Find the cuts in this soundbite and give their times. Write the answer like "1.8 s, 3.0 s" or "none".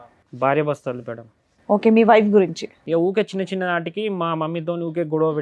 2.7 s